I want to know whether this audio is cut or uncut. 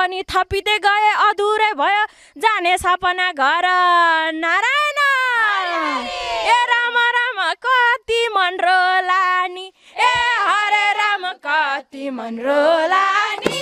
uncut